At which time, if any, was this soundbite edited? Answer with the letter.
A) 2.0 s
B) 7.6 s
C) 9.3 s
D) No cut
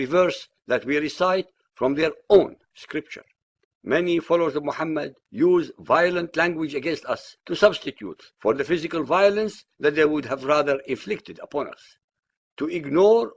A